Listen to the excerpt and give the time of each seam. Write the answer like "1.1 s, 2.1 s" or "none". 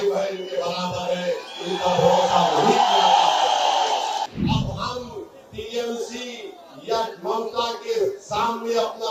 4.3 s